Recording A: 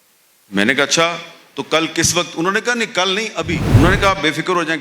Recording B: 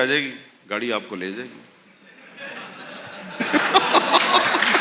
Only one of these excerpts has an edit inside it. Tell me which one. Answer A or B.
A